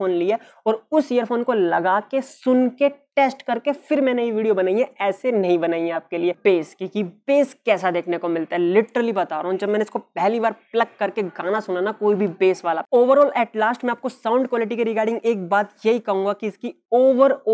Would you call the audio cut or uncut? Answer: cut